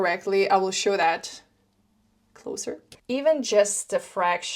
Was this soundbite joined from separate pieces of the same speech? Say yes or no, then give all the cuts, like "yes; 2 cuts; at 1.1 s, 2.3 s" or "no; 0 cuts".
yes; 1 cut; at 2.9 s